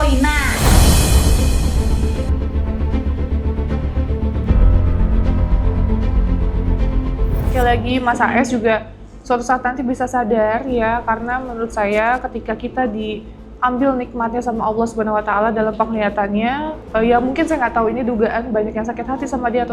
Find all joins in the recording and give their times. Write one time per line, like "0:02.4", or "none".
0:07.5
0:16.8